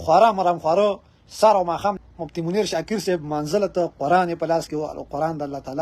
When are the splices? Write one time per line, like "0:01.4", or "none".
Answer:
0:02.0